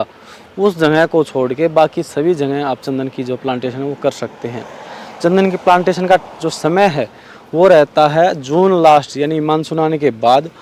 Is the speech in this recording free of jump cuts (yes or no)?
yes